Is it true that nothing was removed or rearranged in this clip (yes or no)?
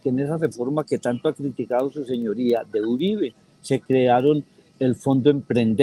yes